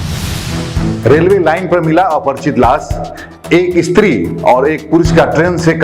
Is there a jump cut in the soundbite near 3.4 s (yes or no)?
no